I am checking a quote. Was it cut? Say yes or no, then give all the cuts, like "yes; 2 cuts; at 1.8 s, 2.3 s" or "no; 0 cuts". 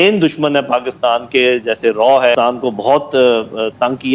yes; 1 cut; at 2.3 s